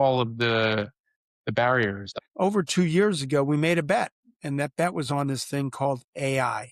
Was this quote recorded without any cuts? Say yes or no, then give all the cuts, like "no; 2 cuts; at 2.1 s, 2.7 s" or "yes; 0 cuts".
no; 1 cut; at 2.2 s